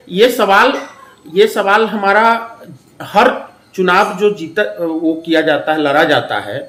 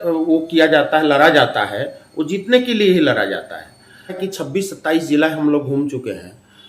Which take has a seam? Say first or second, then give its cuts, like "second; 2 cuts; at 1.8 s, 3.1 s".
second; 1 cut; at 4.2 s